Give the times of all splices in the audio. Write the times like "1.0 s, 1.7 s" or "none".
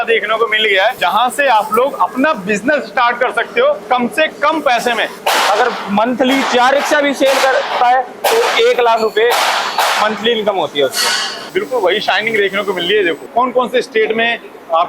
1.0 s, 3.8 s, 5.1 s, 11.4 s, 13.2 s